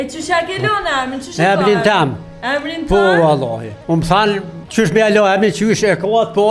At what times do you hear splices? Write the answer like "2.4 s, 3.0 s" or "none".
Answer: 3.7 s, 4.6 s